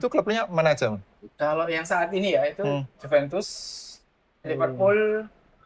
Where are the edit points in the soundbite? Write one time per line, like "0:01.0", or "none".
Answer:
none